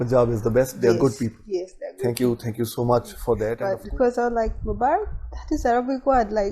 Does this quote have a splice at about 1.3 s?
no; 1 cut; at 3.5 s

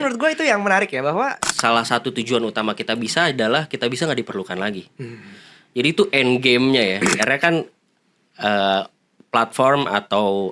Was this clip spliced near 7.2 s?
yes; 2 cuts; at 1.5 s, 7.2 s

